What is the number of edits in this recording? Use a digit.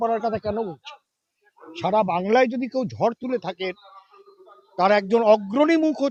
0